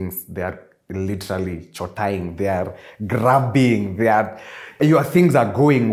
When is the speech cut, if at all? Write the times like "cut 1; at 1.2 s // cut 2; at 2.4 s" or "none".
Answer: cut 1; at 4.8 s